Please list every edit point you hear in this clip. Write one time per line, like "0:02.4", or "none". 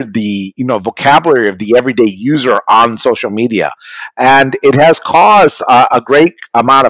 none